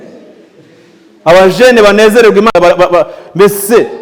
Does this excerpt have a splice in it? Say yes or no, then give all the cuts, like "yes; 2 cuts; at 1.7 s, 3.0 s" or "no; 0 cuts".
no; 0 cuts